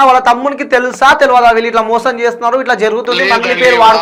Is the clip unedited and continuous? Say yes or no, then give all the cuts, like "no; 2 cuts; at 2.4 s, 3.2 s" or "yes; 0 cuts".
yes; 0 cuts